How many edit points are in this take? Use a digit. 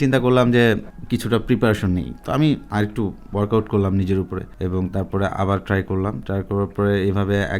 3